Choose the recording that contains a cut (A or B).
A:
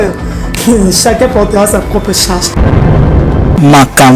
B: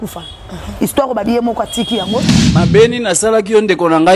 B